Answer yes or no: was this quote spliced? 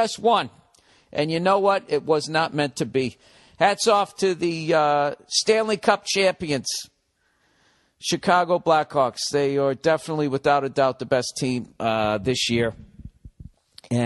no